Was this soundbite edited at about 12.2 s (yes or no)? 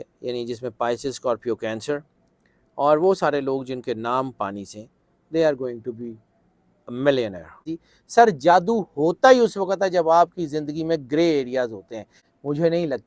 yes